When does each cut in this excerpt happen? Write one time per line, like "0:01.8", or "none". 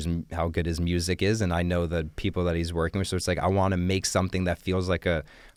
none